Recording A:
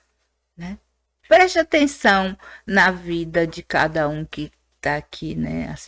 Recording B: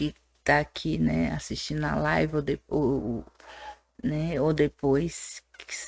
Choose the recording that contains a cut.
A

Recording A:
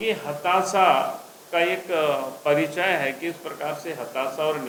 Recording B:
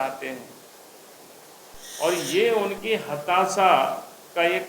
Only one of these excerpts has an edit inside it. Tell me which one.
B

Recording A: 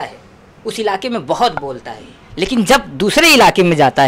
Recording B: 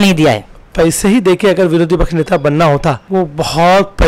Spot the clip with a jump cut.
B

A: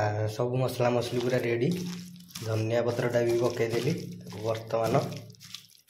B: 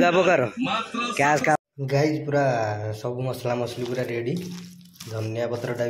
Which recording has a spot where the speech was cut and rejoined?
B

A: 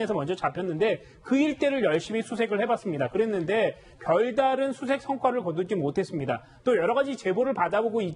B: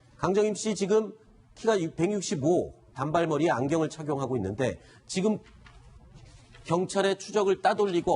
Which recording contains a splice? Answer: B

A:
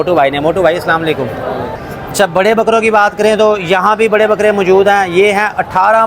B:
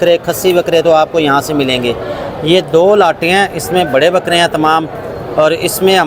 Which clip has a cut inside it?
A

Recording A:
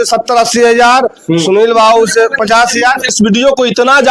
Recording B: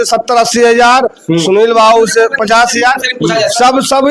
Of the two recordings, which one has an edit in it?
A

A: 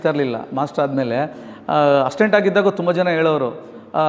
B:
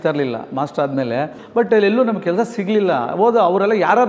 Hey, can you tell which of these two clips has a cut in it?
B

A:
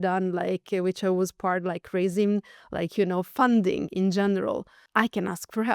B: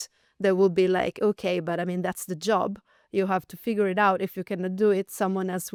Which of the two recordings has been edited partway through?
A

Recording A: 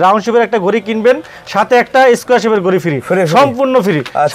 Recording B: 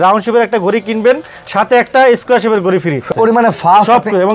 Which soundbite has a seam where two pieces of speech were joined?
B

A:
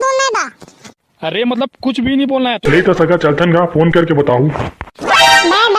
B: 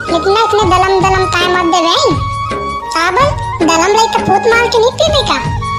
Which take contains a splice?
A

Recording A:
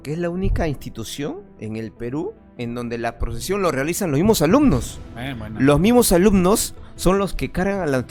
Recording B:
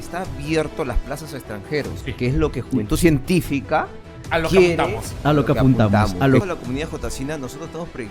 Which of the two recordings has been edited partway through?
B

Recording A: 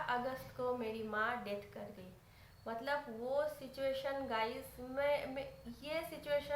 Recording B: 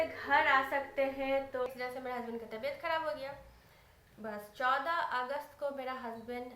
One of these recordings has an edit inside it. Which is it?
B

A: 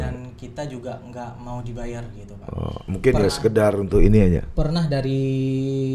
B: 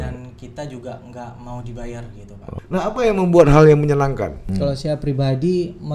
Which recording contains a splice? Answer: B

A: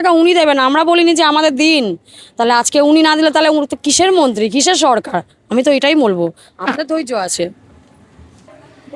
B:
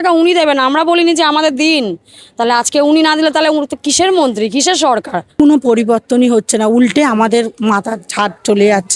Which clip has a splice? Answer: B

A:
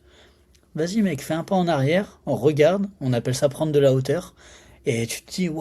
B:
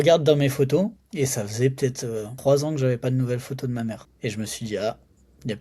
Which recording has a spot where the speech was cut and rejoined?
B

